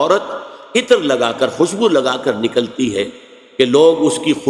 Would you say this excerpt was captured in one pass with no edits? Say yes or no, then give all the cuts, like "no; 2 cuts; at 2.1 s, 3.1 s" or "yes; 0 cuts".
yes; 0 cuts